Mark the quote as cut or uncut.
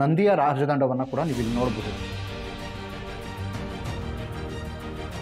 cut